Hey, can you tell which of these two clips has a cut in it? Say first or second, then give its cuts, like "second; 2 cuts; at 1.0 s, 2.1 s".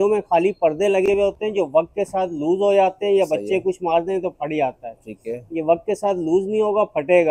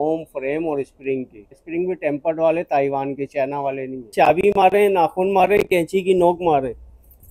second; 2 cuts; at 1.6 s, 4.1 s